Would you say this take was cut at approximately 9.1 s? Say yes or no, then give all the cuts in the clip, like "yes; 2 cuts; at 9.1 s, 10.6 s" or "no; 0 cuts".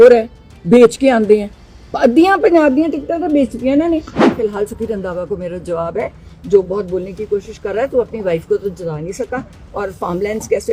no; 1 cut; at 4.4 s